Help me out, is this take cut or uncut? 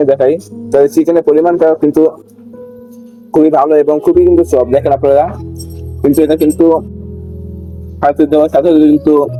uncut